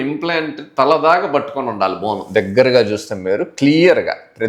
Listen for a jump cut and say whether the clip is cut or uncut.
uncut